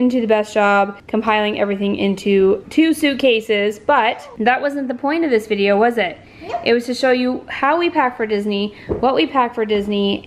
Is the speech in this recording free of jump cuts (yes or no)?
no